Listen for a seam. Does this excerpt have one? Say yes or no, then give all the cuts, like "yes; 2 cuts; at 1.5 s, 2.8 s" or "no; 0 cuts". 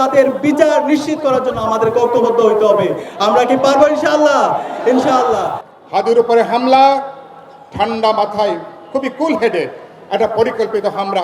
yes; 1 cut; at 5.6 s